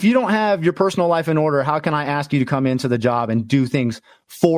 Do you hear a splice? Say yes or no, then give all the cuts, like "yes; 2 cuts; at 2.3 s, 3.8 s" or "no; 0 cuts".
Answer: no; 0 cuts